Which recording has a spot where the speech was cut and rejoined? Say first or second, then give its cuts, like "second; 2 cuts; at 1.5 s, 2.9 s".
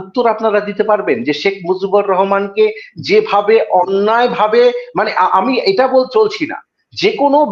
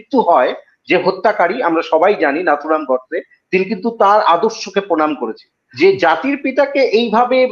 second; 1 cut; at 5.6 s